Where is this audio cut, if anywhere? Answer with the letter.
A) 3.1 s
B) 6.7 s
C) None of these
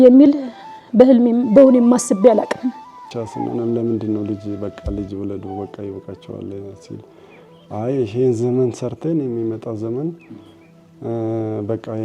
A